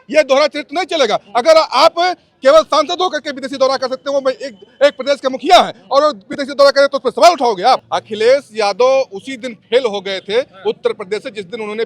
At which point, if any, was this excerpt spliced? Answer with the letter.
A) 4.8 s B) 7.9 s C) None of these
B